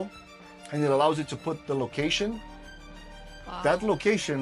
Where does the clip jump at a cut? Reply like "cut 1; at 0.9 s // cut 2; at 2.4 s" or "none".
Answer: none